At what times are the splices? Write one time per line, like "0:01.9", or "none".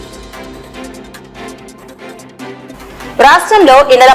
0:01.7
0:02.7